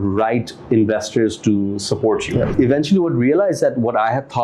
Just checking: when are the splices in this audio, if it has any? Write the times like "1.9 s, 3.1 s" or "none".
2.5 s